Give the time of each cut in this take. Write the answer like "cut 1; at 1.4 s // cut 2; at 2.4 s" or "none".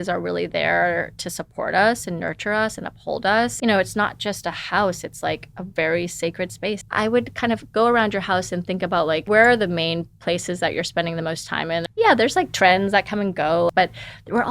cut 1; at 3.5 s // cut 2; at 6.8 s // cut 3; at 9.2 s // cut 4; at 11.9 s // cut 5; at 13.7 s

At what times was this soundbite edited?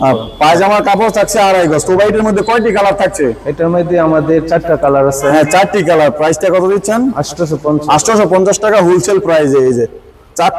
none

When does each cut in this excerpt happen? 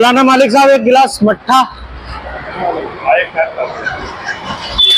none

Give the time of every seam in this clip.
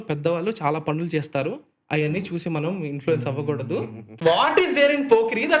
cut 1; at 4.0 s

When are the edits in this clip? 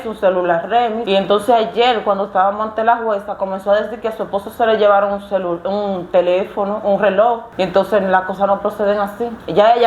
cut 1; at 1.0 s // cut 2; at 7.5 s

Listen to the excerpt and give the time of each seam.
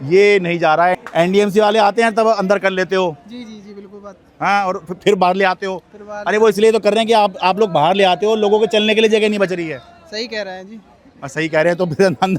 cut 1; at 1.0 s

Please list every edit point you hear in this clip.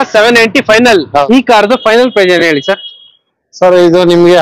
cut 1; at 1.2 s

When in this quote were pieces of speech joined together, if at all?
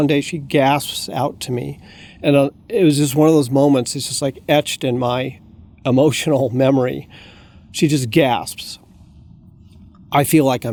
none

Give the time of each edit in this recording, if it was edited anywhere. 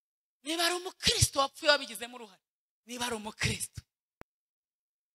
none

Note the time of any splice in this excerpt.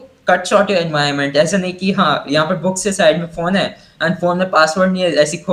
none

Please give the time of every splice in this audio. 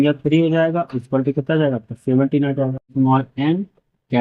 cut 1; at 2.8 s

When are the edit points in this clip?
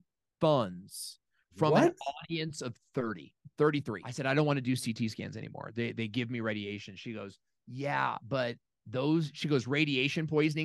cut 1; at 4.0 s

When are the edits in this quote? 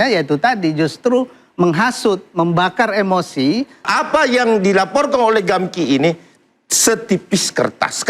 cut 1; at 3.9 s

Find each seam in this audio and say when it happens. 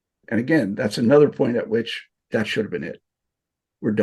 cut 1; at 2.2 s

